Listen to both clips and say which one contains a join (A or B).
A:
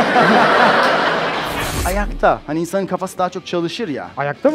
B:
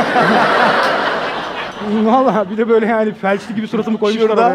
A